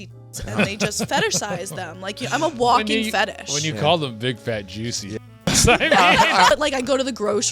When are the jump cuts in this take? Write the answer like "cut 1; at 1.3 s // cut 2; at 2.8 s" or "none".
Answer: cut 1; at 6.5 s